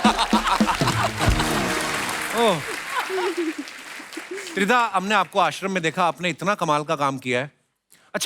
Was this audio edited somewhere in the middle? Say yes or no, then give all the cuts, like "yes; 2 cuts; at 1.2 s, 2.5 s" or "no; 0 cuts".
no; 0 cuts